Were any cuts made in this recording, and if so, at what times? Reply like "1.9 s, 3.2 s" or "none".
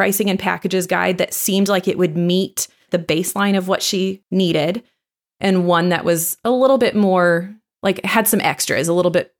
2.8 s, 4.2 s